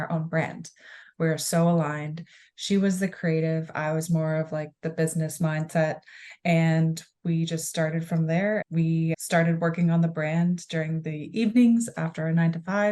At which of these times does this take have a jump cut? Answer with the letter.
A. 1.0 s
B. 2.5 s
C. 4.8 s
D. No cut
A